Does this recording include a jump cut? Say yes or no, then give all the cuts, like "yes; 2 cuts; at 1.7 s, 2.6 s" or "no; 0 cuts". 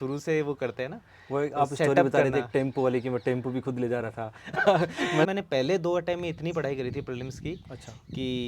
yes; 1 cut; at 5.3 s